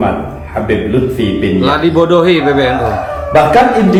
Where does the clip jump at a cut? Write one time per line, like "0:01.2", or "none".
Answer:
none